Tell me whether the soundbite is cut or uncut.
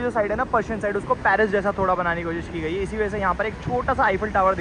uncut